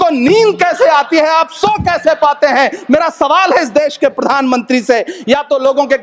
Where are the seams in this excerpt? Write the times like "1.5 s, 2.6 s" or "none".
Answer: none

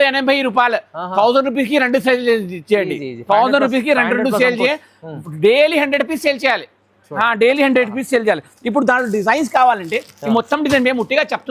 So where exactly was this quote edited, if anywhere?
none

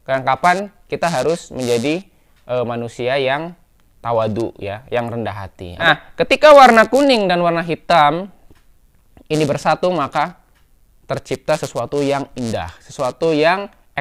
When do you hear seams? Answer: 5.9 s

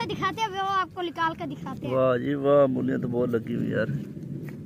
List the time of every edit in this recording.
none

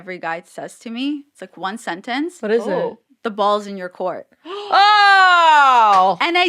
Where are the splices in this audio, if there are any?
none

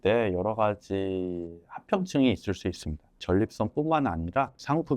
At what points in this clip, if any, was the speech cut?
3.1 s

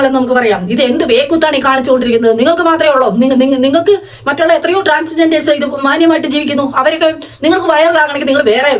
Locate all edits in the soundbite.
none

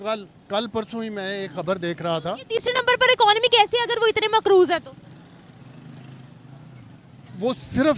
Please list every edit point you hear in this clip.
none

